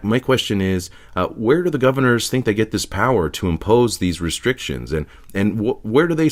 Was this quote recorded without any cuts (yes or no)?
yes